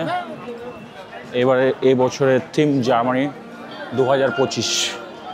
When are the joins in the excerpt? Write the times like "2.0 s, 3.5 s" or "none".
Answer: none